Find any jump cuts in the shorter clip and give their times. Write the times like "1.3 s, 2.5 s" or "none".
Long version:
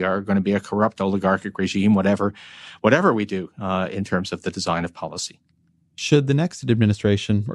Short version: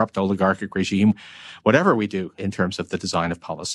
1.1 s, 2.4 s